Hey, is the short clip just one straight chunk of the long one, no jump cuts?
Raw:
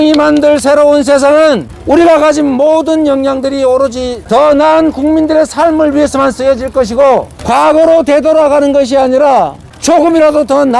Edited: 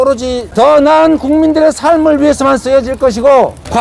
yes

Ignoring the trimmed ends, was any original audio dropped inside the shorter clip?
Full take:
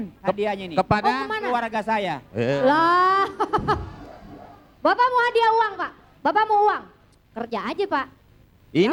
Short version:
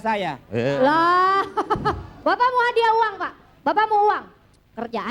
yes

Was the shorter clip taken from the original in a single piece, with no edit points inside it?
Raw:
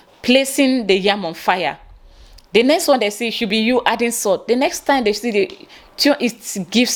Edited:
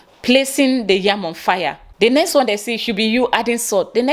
no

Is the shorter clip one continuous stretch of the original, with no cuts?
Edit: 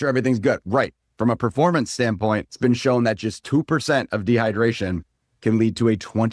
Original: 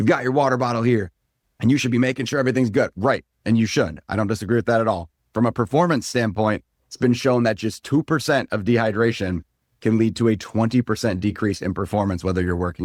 no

